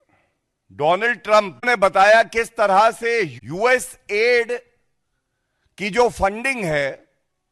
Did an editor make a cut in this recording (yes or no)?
yes